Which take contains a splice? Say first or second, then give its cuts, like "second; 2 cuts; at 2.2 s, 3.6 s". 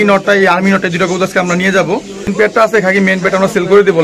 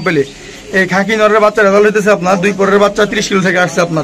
first; 1 cut; at 2.3 s